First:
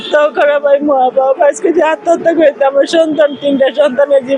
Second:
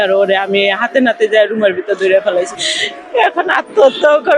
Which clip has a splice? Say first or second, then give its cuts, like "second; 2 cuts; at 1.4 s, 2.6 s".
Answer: second; 1 cut; at 2.5 s